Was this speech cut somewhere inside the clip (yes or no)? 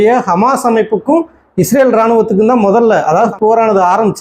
yes